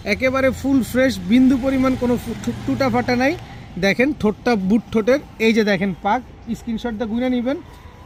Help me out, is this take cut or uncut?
uncut